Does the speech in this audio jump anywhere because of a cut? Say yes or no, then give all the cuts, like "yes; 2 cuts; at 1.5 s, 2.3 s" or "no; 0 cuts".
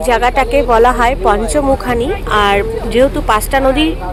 no; 0 cuts